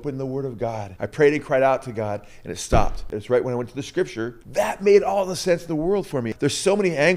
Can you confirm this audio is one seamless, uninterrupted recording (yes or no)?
no